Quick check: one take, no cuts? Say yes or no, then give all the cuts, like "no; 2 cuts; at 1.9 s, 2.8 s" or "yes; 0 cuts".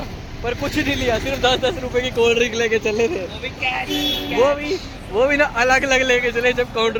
yes; 0 cuts